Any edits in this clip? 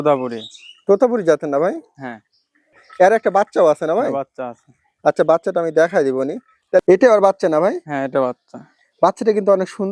yes; 2 cuts; at 2.7 s, 6.8 s

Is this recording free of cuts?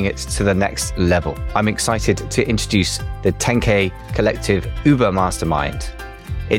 yes; 0 cuts

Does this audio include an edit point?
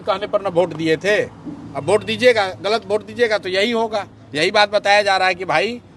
no; 0 cuts

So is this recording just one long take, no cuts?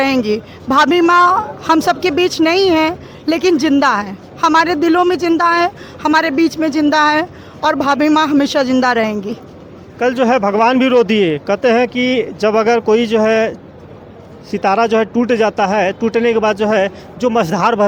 yes; 0 cuts

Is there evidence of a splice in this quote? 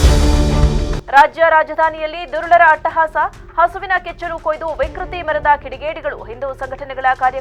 no; 0 cuts

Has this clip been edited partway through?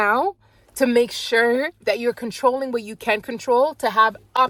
no; 0 cuts

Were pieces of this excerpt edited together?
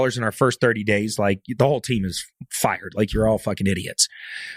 no; 0 cuts

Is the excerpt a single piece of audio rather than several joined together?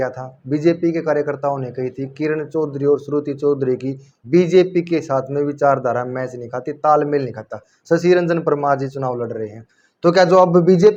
yes; 0 cuts

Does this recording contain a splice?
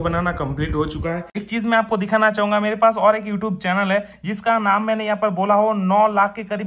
yes; 1 cut; at 1.4 s

